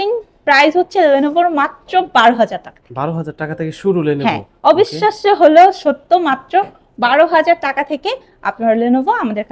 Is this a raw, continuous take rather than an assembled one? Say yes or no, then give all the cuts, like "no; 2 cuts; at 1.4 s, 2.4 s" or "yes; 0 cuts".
yes; 0 cuts